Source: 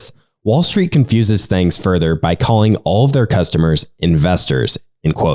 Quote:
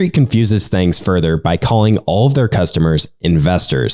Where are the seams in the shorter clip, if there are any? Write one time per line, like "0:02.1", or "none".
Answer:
none